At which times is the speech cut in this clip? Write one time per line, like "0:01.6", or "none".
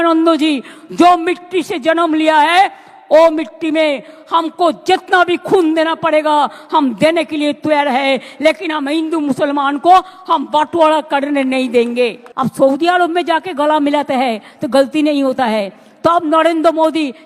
0:12.2